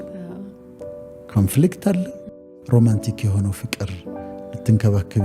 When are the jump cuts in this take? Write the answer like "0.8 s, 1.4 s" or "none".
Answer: 2.2 s